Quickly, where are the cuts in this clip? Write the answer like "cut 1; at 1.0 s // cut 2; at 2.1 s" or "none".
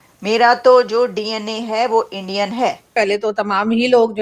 cut 1; at 2.9 s

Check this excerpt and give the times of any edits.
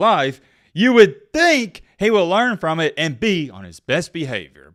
none

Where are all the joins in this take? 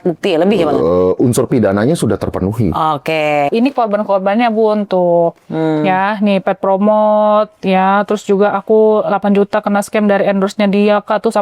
cut 1; at 3.5 s

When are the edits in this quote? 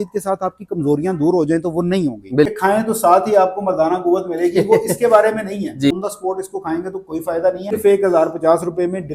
cut 1; at 2.5 s // cut 2; at 5.9 s // cut 3; at 7.8 s

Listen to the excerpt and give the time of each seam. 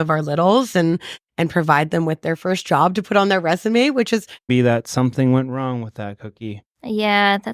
cut 1; at 4.5 s

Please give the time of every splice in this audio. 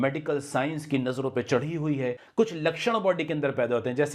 cut 1; at 2.2 s

